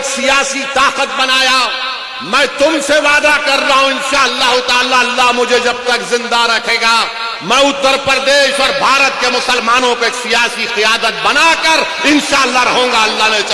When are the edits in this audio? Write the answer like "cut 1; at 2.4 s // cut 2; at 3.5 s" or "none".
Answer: none